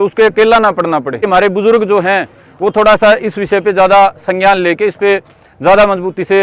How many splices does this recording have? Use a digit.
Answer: 1